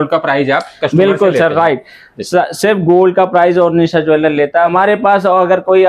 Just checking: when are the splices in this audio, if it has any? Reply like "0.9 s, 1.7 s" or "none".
4.7 s